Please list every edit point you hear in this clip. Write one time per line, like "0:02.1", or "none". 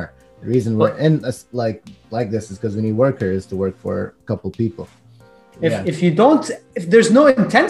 0:05.5